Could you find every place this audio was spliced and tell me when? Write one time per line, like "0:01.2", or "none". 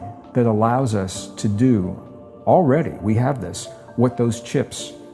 none